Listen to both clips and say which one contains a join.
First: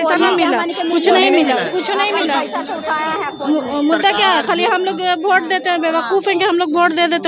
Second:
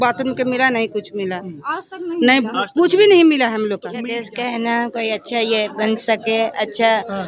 second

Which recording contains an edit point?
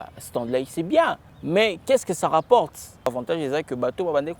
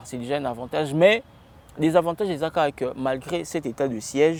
first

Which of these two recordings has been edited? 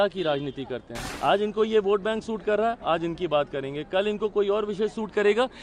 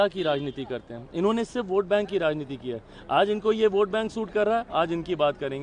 first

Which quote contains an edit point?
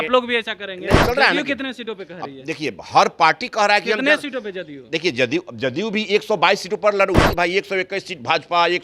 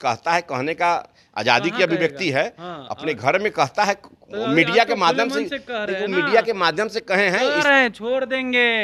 first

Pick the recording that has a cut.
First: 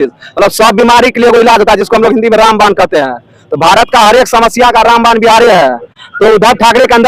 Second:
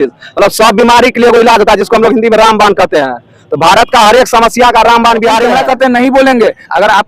second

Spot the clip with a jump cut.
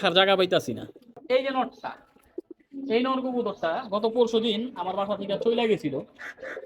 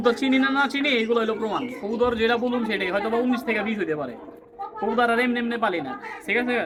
first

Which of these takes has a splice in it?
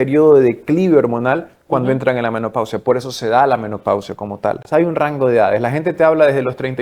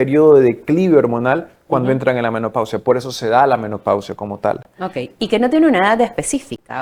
first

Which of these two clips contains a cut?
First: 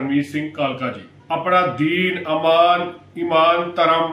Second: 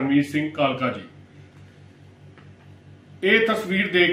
first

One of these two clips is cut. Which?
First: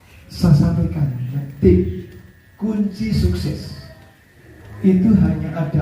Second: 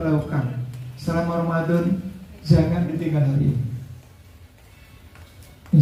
first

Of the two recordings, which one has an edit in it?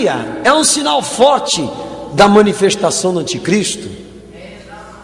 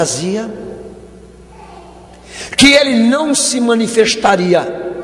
first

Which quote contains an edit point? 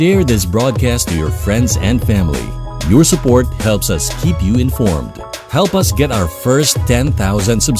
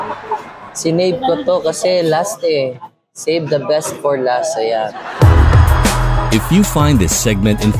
second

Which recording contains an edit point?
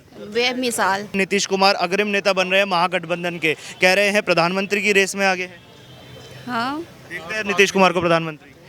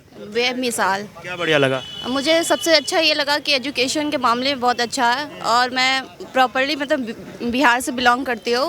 first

